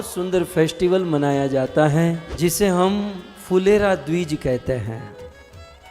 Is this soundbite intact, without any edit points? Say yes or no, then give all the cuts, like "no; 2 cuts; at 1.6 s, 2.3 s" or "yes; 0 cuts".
no; 1 cut; at 2.3 s